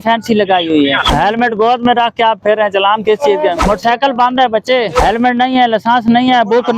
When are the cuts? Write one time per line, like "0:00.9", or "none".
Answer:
0:01.0
0:03.6
0:05.0